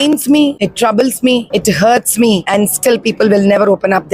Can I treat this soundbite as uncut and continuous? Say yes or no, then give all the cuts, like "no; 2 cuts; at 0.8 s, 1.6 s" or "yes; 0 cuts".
no; 2 cuts; at 1.0 s, 2.4 s